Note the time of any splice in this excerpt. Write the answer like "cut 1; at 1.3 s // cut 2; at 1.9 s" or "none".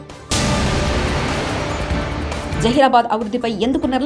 cut 1; at 2.3 s